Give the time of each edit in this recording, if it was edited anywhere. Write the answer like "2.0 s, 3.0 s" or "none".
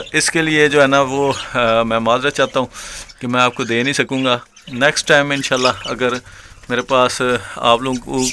none